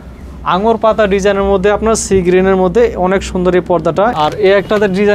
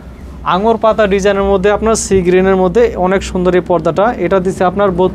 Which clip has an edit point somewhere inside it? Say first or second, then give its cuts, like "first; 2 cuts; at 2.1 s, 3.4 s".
first; 1 cut; at 4.1 s